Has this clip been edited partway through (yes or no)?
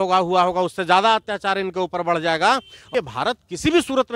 yes